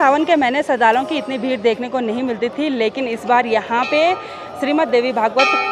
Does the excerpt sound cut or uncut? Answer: uncut